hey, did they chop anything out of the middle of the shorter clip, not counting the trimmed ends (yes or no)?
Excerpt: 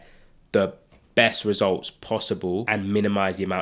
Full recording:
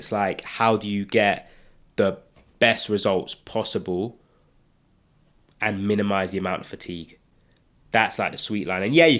yes